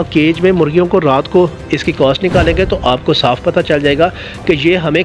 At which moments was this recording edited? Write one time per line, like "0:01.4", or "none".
0:01.6